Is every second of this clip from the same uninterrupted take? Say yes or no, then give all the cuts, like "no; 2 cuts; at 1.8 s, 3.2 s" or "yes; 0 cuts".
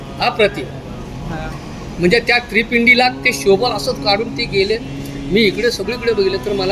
yes; 0 cuts